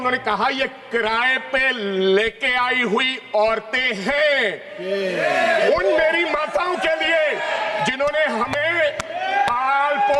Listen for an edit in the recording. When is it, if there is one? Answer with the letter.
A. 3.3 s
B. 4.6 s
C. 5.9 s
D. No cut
D